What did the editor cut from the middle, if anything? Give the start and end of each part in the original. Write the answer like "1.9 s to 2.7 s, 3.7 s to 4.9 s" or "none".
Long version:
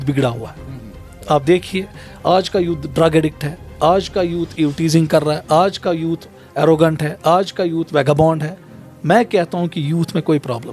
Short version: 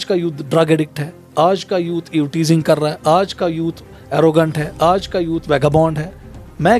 none

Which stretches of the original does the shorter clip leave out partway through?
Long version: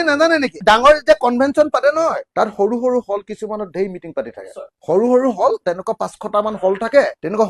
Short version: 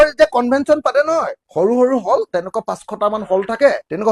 2.2 s to 4.7 s

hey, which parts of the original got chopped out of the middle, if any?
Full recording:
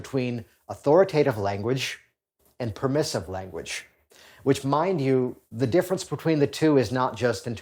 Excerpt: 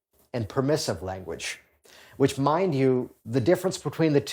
none

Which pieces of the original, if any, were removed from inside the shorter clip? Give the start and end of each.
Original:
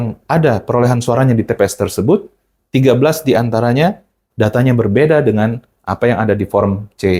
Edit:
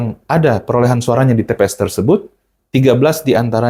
none

